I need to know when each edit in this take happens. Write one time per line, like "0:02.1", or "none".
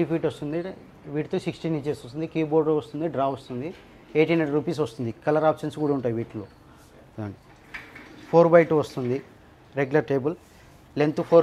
none